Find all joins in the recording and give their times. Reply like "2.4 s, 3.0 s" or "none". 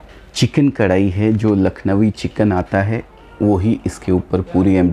none